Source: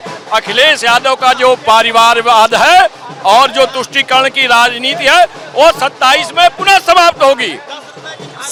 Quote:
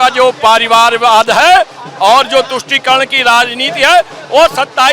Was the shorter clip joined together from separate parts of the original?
no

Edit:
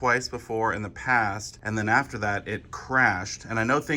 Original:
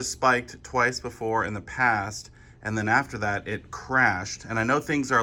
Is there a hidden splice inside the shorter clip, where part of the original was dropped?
yes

